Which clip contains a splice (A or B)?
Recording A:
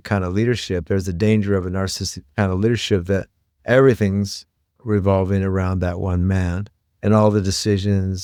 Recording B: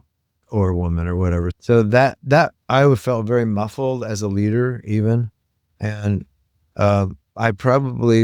B